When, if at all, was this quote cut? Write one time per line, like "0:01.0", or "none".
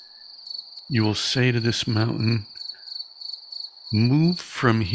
0:02.5
0:03.9